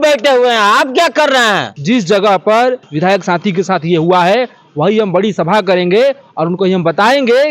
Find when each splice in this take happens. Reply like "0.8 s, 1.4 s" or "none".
1.7 s, 2.9 s